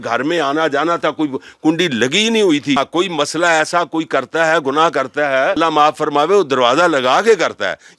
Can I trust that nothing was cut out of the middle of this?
no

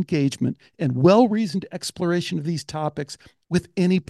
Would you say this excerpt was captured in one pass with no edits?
yes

